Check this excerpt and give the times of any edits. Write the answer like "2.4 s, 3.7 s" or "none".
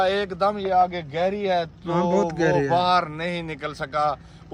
none